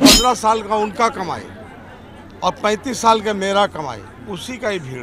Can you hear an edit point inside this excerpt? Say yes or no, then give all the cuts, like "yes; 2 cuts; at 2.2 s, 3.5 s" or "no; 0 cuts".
no; 0 cuts